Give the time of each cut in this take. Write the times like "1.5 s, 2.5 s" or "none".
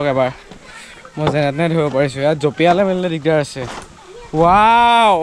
none